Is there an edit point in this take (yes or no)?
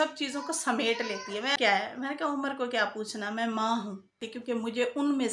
yes